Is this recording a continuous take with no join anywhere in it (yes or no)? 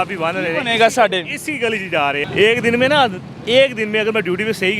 no